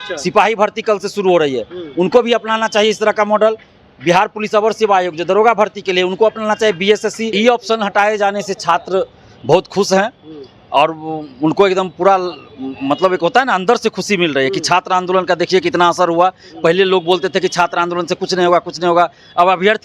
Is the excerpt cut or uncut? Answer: cut